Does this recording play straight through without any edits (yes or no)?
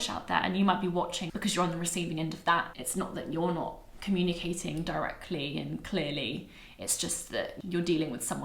no